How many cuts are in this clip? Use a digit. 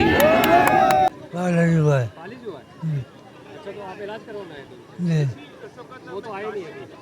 1